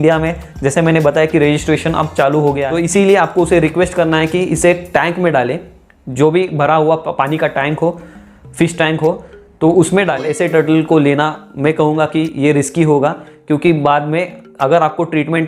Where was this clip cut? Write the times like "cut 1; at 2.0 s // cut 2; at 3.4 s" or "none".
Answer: cut 1; at 2.7 s // cut 2; at 10.2 s

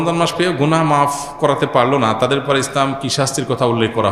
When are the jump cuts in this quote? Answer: none

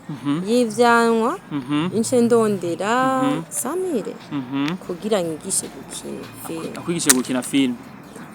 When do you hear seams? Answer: none

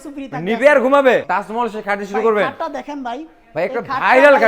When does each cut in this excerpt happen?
cut 1; at 1.2 s

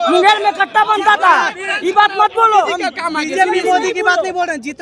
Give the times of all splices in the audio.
none

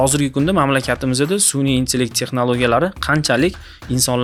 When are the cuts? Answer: none

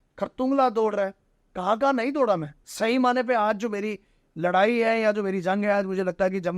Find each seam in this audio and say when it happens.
cut 1; at 2.6 s

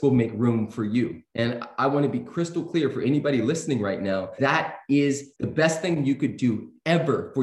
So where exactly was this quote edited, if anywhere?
cut 1; at 1.2 s // cut 2; at 4.3 s // cut 3; at 5.3 s

